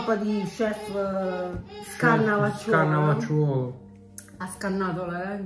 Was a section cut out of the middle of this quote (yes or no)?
no